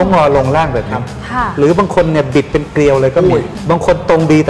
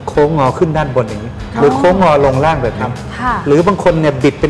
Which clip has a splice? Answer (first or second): first